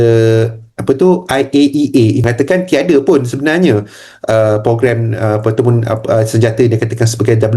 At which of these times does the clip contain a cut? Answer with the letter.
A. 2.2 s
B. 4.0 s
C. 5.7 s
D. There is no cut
A